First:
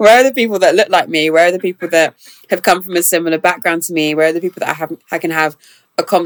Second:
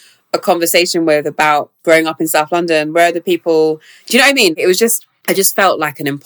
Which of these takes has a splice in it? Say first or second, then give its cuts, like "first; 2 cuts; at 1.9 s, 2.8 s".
second; 2 cuts; at 1.7 s, 5.1 s